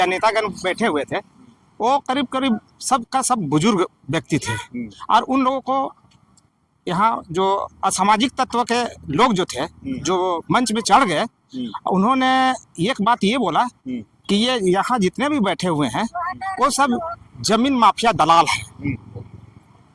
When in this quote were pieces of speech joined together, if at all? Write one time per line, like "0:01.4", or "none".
none